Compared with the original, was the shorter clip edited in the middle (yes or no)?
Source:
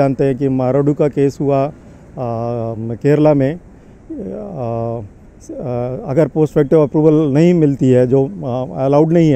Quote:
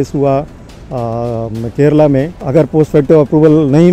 yes